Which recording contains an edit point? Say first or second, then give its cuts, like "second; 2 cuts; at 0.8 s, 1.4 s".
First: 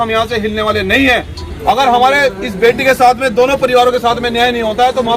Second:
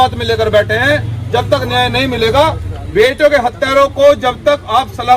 first; 1 cut; at 1.5 s